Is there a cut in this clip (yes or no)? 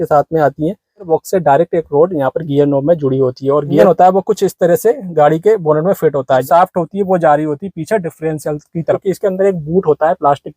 yes